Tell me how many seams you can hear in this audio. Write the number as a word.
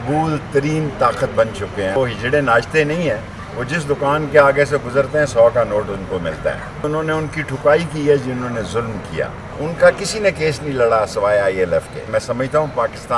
four